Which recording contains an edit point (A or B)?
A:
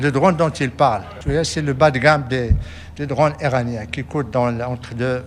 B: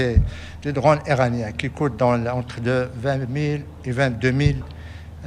A